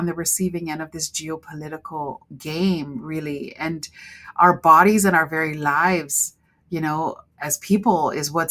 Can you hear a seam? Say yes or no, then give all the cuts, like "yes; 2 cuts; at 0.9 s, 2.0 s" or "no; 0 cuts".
no; 0 cuts